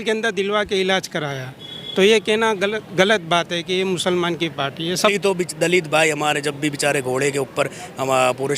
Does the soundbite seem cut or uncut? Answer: cut